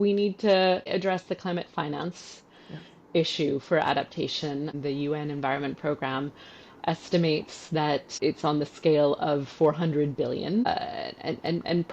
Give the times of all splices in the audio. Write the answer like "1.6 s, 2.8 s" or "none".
0.9 s, 4.8 s, 8.1 s, 10.7 s